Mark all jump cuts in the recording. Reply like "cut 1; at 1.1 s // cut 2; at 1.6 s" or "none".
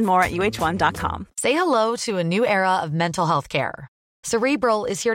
cut 1; at 1.2 s